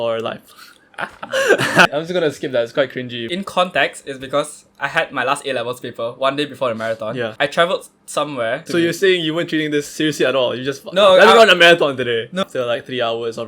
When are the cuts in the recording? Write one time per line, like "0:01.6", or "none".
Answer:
0:01.9
0:03.2
0:07.3
0:08.6
0:12.4